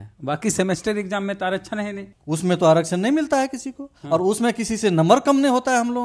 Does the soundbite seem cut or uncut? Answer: cut